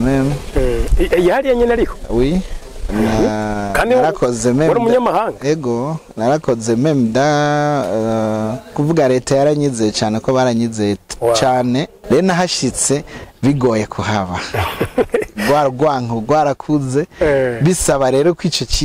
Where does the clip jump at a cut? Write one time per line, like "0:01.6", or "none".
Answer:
0:08.8
0:11.9